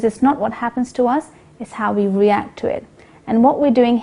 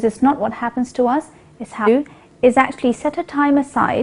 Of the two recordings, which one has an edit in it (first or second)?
first